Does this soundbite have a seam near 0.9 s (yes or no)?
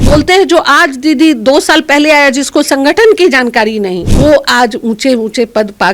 no